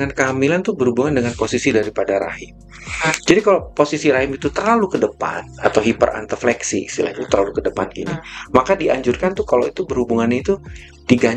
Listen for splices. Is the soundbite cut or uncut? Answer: uncut